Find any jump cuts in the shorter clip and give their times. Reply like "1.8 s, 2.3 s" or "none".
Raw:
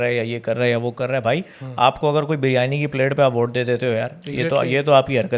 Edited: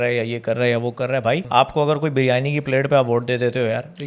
1.4 s